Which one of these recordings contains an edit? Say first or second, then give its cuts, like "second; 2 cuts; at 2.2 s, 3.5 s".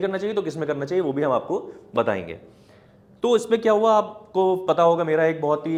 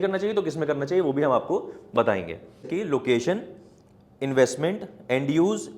second; 1 cut; at 2.7 s